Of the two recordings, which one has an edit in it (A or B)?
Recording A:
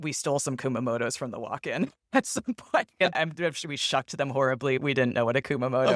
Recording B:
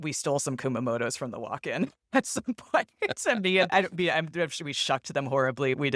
A